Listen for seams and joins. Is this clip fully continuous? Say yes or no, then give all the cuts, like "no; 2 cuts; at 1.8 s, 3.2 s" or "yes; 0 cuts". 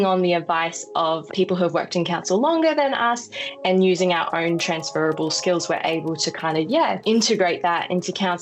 no; 2 cuts; at 1.3 s, 7.0 s